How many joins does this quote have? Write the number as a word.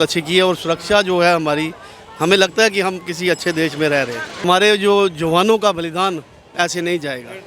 one